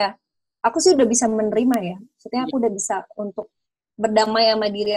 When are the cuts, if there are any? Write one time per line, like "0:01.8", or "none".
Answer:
none